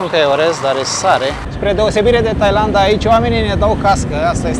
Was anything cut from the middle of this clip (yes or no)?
yes